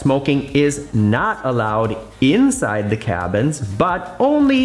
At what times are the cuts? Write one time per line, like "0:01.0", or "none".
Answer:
none